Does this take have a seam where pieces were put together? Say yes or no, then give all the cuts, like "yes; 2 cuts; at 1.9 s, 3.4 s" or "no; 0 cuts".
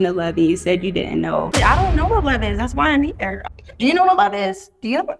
yes; 2 cuts; at 1.5 s, 3.3 s